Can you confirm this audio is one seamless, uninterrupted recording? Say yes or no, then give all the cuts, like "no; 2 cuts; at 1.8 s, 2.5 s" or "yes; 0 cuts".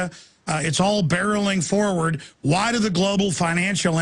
yes; 0 cuts